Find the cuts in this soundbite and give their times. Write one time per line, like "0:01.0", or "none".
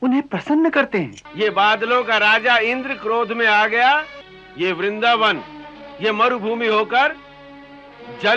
0:01.2
0:04.5